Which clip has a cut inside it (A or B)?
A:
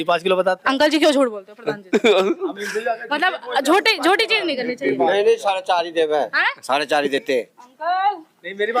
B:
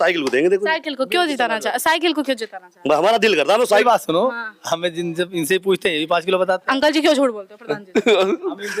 B